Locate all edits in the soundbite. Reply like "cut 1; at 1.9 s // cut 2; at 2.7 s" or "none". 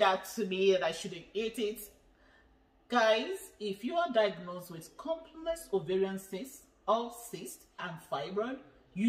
cut 1; at 7.9 s